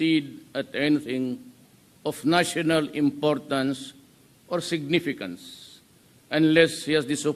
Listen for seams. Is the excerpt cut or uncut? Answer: uncut